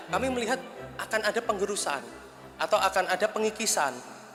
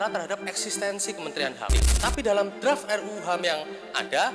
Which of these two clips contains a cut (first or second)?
second